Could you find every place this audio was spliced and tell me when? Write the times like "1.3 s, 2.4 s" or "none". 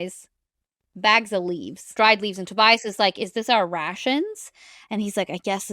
1.8 s